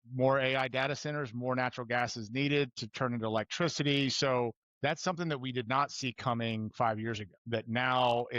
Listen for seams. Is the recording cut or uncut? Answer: cut